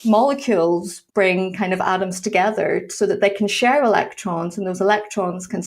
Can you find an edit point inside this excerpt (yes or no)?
yes